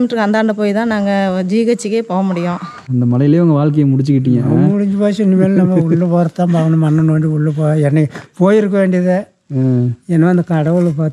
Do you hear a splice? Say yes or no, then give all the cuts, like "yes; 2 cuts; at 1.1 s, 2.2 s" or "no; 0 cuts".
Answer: yes; 1 cut; at 2.9 s